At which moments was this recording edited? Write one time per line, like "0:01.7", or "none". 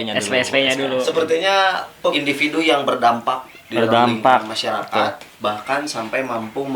0:02.1